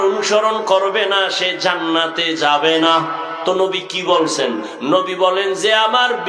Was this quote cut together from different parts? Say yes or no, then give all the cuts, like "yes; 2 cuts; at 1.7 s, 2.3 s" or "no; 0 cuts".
no; 0 cuts